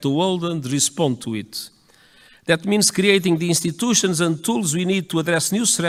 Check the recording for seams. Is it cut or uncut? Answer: uncut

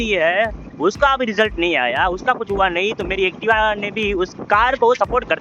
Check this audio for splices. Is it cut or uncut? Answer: uncut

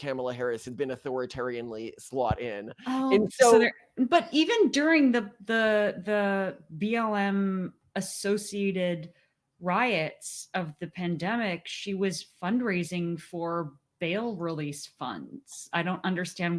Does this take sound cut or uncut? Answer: uncut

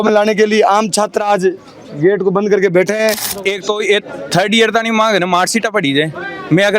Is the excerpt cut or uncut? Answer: cut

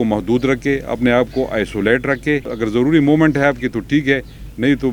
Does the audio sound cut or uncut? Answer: uncut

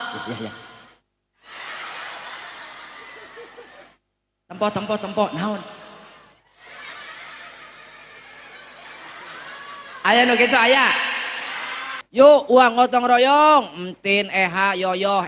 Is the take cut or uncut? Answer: cut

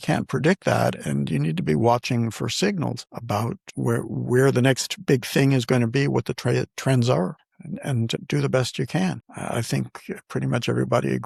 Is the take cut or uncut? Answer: uncut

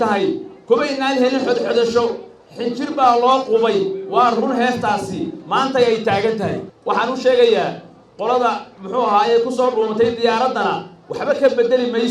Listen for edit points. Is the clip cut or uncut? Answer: cut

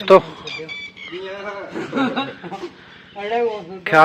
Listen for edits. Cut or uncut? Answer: uncut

